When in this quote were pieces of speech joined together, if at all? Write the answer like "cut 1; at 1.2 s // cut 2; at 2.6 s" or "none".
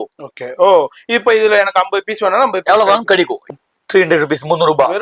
cut 1; at 3.4 s